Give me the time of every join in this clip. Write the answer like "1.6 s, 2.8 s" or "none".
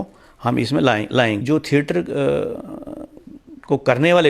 1.4 s

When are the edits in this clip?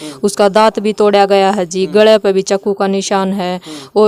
none

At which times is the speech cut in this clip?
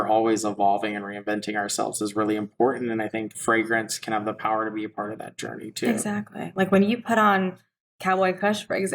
3.3 s

